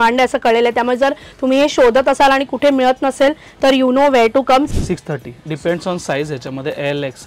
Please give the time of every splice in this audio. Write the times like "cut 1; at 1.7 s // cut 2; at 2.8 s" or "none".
cut 1; at 4.7 s